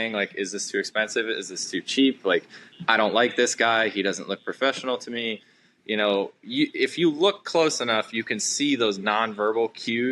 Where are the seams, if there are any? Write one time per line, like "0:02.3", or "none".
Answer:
none